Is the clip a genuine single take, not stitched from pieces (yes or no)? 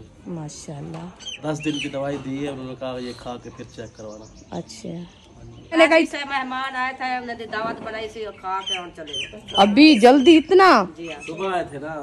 no